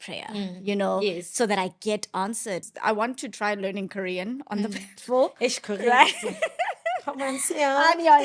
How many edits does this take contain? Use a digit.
1